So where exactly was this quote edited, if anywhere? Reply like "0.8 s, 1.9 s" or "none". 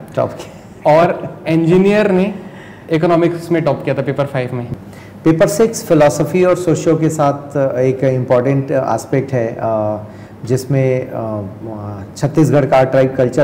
4.7 s

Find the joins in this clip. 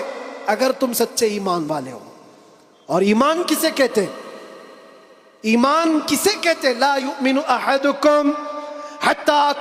none

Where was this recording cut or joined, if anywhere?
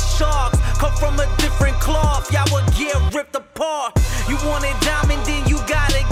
none

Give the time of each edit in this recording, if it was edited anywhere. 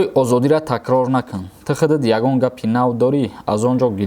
none

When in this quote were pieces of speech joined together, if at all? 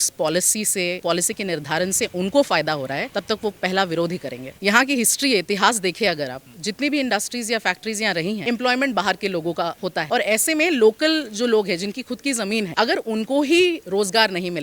4.6 s, 8.4 s, 12.7 s

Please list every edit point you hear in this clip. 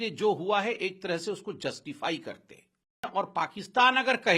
3.1 s

